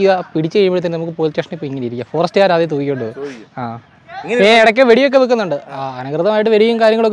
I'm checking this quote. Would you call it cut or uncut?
uncut